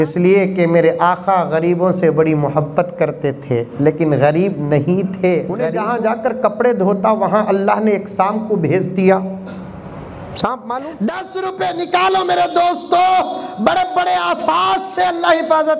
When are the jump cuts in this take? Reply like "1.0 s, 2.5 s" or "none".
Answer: 5.7 s, 10.9 s